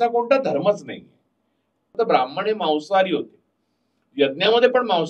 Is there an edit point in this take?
yes; 1 cut; at 1.9 s

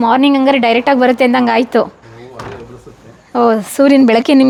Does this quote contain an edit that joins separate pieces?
no; 0 cuts

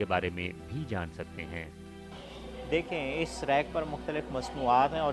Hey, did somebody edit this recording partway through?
yes; 1 cut; at 2.1 s

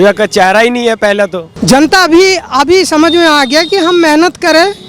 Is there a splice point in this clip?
yes; 1 cut; at 1.5 s

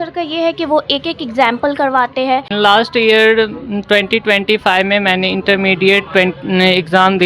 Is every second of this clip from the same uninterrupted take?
no; 1 cut; at 2.5 s

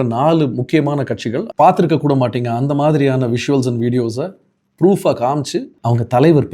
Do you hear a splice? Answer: yes; 2 cuts; at 1.4 s, 5.7 s

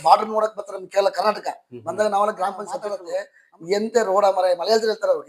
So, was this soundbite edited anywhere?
yes; 1 cut; at 3.0 s

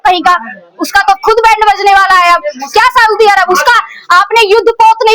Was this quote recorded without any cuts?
yes; 0 cuts

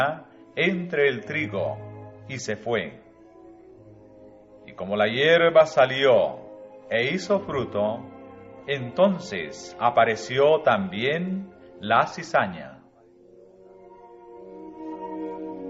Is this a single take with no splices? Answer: yes; 0 cuts

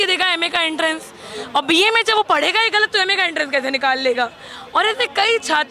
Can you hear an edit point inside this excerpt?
no; 0 cuts

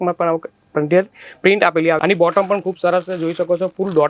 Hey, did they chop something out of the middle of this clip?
yes; 1 cut; at 2.0 s

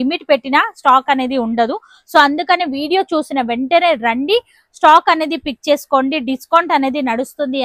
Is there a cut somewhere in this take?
no; 0 cuts

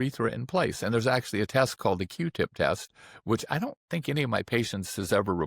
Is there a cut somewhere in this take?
no; 0 cuts

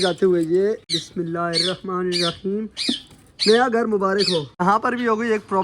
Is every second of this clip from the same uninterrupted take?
no; 2 cuts; at 1.0 s, 4.5 s

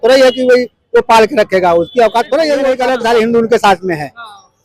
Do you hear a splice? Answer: yes; 1 cut; at 2.8 s

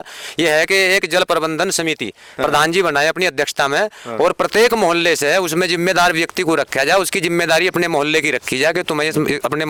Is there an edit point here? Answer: no; 0 cuts

